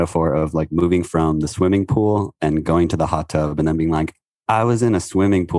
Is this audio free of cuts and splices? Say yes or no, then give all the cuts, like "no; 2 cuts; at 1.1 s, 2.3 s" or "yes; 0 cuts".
yes; 0 cuts